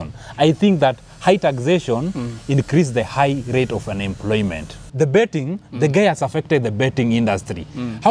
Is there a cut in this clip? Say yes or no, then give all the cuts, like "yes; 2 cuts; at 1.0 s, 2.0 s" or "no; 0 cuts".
yes; 1 cut; at 4.8 s